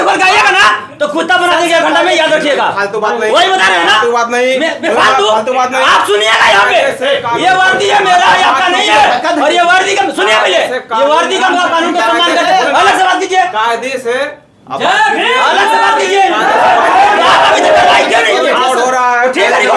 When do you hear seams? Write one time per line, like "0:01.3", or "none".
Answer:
none